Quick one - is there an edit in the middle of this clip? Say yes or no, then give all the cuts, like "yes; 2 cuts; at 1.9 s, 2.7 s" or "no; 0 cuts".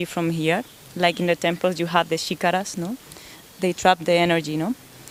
no; 0 cuts